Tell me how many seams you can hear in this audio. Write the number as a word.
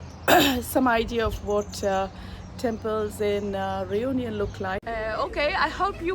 one